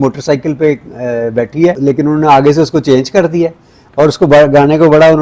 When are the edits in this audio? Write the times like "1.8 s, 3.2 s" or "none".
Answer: 1.8 s